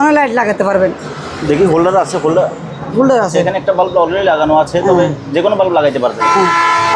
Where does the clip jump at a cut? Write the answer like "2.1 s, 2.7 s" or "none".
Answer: none